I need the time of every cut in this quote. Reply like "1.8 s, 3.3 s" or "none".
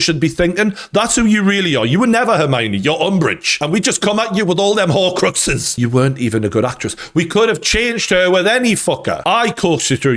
3.5 s, 5.7 s

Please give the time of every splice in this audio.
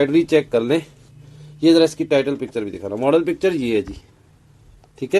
none

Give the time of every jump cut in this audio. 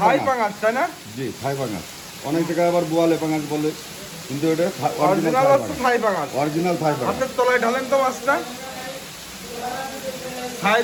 none

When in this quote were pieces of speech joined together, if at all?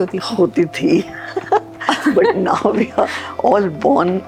none

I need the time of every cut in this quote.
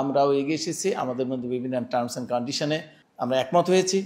3.0 s

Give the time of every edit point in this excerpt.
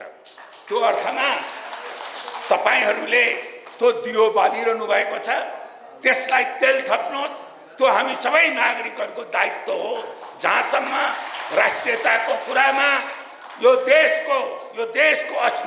none

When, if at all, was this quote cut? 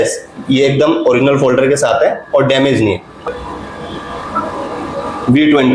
3.1 s

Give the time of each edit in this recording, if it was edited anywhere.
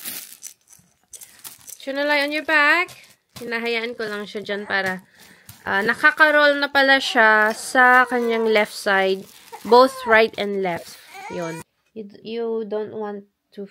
11.8 s

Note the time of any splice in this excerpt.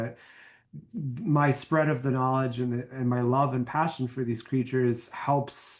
none

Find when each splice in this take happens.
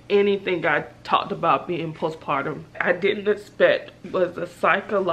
2.8 s

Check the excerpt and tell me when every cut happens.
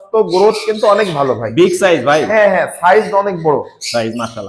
none

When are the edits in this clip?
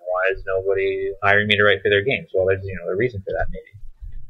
1.2 s

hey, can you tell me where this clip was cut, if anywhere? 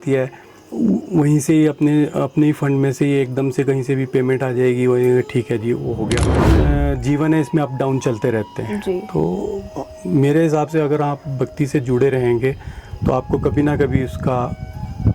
6.5 s

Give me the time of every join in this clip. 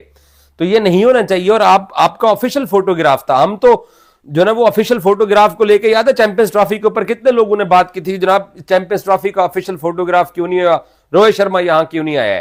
none

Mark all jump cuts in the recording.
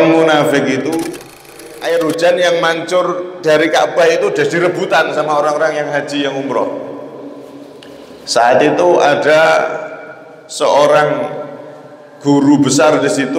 1.7 s

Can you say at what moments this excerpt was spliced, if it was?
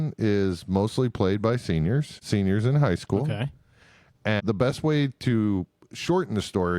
2.2 s, 4.4 s

